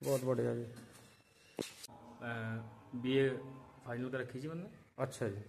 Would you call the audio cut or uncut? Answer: cut